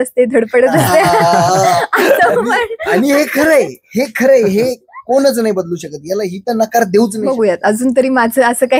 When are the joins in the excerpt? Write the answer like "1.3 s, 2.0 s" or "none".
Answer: 7.2 s